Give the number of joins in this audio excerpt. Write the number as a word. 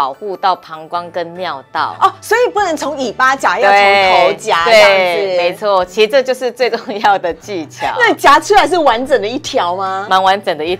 zero